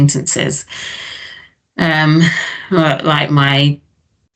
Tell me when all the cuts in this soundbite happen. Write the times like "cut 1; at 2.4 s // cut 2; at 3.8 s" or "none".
none